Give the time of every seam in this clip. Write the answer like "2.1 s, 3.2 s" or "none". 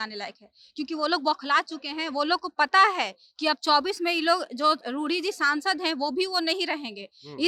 none